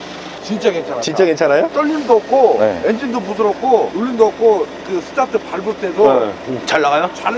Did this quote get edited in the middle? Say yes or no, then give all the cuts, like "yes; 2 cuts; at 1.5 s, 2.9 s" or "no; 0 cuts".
yes; 2 cuts; at 1.7 s, 3.9 s